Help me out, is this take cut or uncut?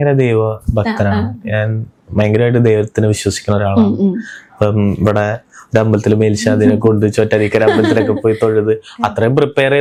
uncut